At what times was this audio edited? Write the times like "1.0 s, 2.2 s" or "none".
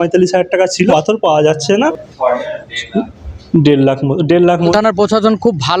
0.9 s, 1.9 s, 4.7 s

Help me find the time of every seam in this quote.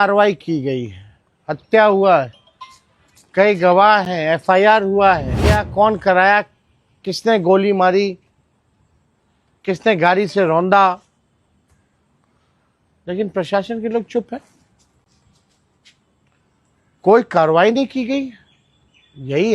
5.4 s

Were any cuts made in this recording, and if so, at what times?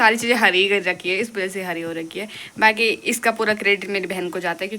none

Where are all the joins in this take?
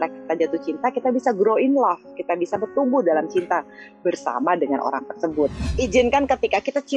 5.7 s

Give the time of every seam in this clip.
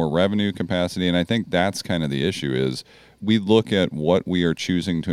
3.2 s

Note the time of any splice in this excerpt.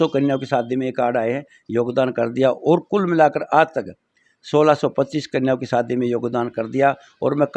none

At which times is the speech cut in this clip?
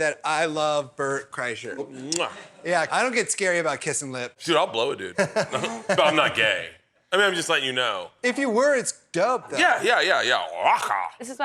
1.9 s, 2.9 s, 4.4 s

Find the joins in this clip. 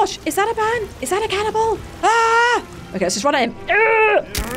0.9 s, 1.9 s, 2.8 s

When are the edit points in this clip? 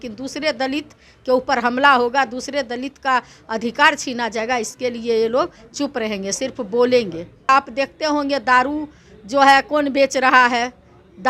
7.5 s

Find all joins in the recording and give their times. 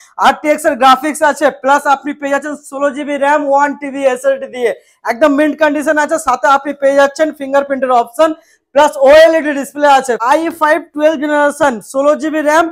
10.2 s

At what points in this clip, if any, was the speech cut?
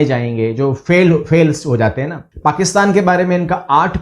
2.2 s

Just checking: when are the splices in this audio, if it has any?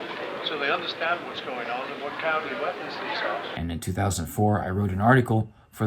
3.5 s

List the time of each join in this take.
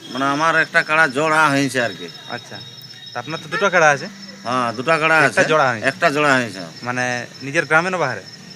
none

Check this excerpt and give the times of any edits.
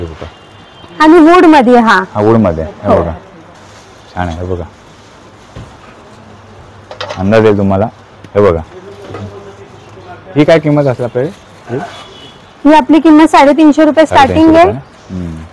none

